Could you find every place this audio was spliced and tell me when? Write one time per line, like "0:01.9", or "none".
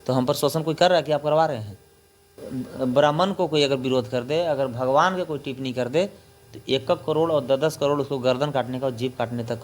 0:02.4